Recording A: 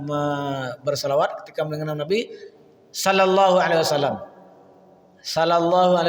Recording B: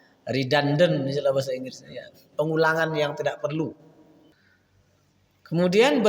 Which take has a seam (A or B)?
B